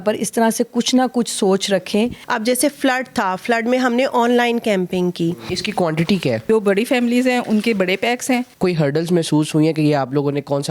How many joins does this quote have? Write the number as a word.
four